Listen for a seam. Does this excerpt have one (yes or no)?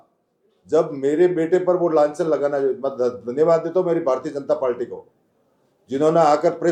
no